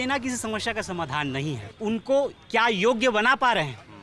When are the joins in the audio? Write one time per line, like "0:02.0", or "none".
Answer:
0:01.6